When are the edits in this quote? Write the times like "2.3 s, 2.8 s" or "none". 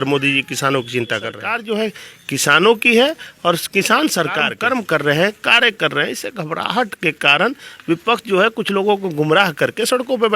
1.5 s, 4.5 s